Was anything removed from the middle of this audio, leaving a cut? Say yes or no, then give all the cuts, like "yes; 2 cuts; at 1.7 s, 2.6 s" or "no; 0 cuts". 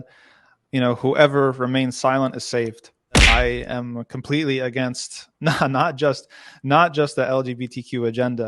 yes; 1 cut; at 3.2 s